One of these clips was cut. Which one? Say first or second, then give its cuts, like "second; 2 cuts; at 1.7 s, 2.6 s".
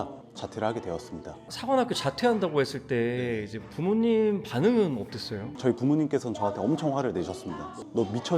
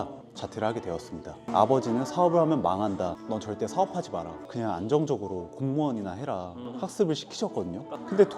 second; 2 cuts; at 1.4 s, 6.6 s